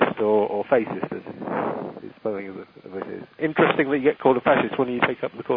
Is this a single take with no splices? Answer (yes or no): no